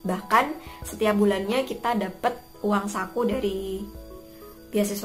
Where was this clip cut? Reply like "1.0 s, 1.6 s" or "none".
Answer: none